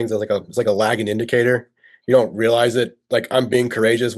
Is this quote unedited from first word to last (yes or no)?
yes